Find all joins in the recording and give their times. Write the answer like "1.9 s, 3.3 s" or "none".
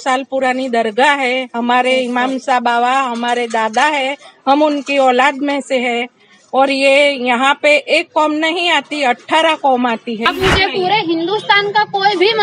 10.3 s